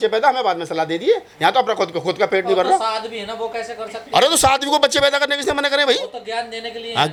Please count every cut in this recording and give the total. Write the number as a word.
zero